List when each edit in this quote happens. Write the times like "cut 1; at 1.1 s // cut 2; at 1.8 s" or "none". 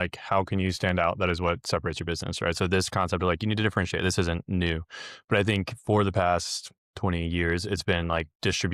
none

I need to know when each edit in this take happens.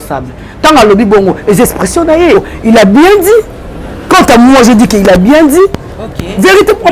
cut 1; at 2.4 s

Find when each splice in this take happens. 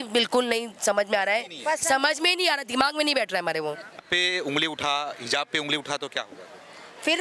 cut 1; at 4.0 s

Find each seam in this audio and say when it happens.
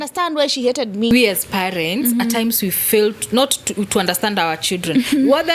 cut 1; at 1.1 s

